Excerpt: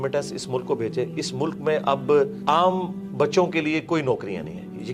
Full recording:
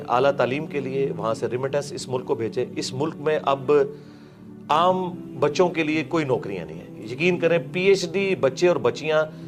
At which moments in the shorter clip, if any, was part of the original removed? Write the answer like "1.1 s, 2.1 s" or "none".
2.4 s